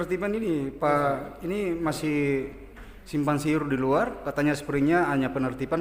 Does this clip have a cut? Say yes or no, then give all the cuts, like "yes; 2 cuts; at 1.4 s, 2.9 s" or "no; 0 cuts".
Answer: no; 0 cuts